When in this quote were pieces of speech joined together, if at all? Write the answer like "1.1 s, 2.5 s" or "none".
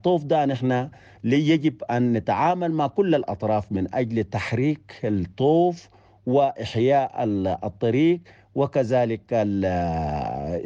none